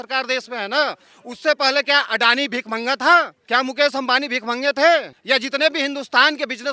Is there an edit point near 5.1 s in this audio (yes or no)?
yes